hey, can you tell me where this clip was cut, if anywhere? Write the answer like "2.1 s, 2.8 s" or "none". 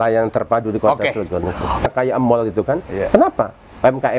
1.9 s